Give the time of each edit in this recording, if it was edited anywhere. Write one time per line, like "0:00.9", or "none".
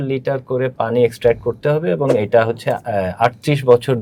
none